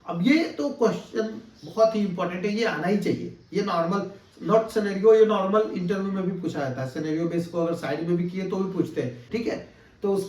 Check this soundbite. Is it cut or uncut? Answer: cut